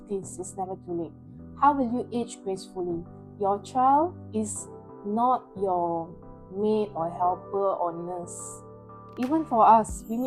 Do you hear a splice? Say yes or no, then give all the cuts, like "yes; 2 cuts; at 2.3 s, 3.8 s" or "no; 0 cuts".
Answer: no; 0 cuts